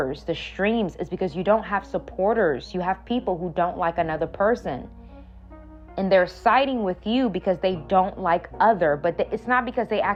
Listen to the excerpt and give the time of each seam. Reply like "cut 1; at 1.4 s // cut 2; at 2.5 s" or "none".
none